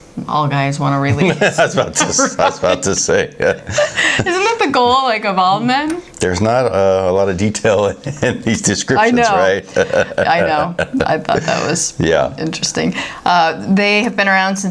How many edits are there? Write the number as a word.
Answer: zero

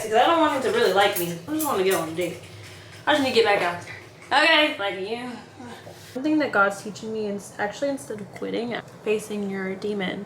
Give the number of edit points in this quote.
three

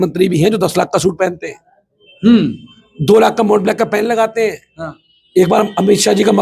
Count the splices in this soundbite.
zero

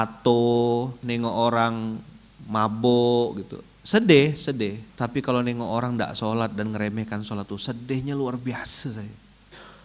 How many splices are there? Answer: two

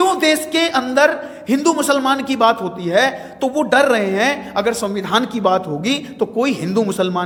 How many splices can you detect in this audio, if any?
zero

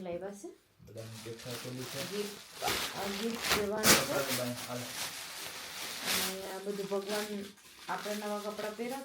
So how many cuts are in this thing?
one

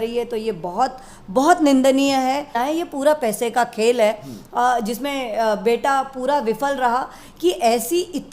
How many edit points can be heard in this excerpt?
one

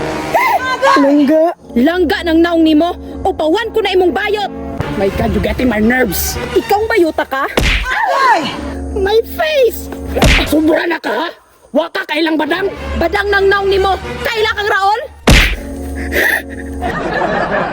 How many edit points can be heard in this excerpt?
three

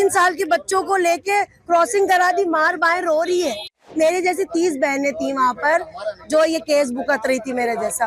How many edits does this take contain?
one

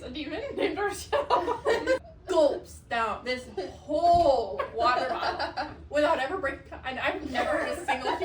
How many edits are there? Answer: one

